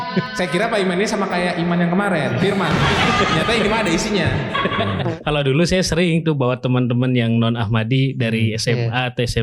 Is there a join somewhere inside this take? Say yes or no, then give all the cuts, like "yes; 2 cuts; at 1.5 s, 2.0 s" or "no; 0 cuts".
yes; 1 cut; at 5.0 s